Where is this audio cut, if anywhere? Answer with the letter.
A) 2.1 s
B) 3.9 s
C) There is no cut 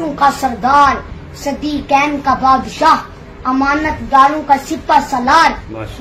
C